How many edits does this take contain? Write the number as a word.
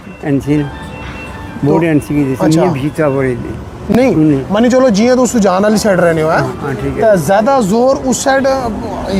zero